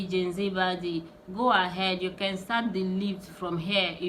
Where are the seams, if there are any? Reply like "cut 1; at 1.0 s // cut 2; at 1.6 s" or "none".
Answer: none